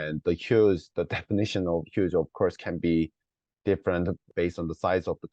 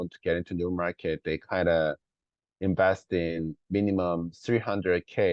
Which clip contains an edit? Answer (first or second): first